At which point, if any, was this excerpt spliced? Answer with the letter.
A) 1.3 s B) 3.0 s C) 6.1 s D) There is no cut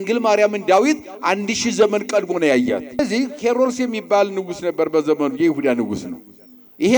B